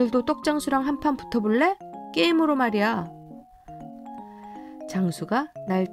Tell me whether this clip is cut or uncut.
cut